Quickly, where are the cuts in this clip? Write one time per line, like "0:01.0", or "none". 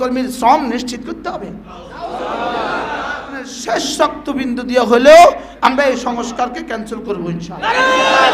0:03.5